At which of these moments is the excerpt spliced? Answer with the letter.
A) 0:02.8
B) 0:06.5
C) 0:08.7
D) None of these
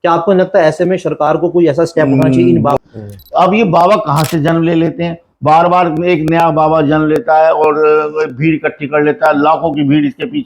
A